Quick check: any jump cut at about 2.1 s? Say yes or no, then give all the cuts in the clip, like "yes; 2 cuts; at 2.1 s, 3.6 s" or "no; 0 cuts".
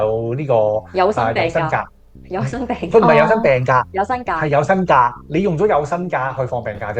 no; 0 cuts